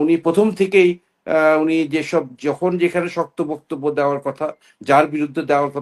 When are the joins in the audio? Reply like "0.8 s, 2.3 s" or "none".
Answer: none